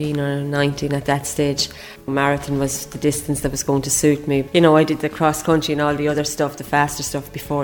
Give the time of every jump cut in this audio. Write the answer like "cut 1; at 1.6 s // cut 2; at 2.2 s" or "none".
cut 1; at 2.1 s // cut 2; at 4.5 s